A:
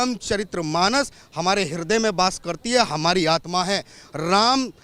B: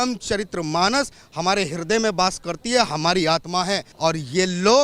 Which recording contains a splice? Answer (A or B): B